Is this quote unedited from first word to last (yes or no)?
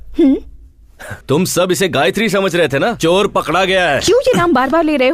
no